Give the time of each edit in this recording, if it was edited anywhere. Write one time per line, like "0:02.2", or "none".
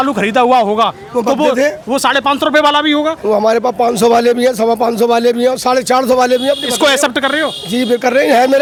none

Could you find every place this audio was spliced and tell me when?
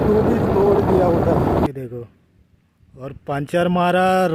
0:01.7

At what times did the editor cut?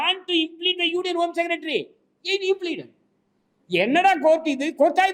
none

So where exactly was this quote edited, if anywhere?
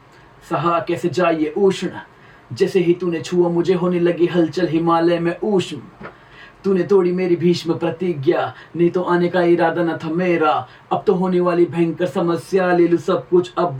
none

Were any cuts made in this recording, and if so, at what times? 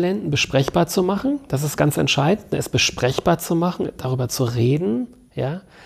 none

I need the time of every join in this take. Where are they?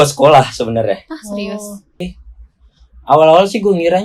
0:02.0

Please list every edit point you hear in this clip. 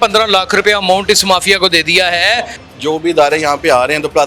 0:02.6

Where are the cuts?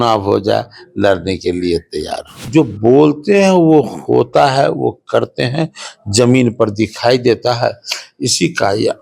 0:02.4

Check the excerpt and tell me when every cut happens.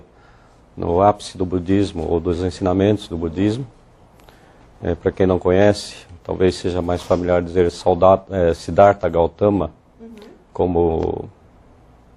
0:09.3

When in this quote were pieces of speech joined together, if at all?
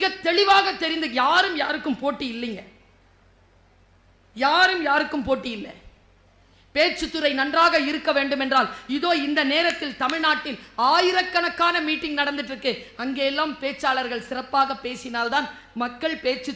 none

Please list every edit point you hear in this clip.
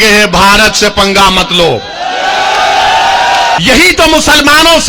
0:03.6

